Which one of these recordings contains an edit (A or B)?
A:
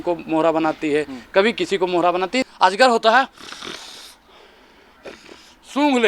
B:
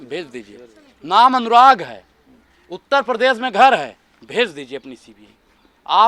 A